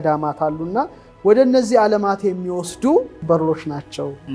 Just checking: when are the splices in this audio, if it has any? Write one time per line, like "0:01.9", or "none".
0:03.2